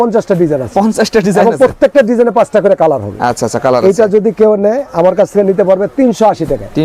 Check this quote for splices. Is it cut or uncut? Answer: uncut